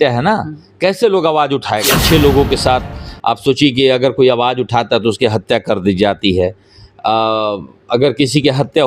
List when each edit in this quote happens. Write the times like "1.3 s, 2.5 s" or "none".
1.9 s